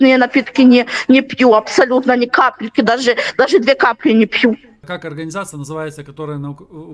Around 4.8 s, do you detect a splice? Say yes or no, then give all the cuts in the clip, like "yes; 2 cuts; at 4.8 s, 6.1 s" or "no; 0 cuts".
yes; 1 cut; at 4.8 s